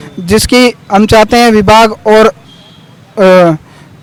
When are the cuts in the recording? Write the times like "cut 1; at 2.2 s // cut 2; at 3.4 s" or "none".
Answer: none